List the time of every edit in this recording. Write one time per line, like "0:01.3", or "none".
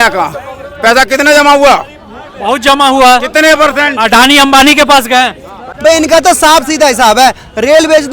0:05.7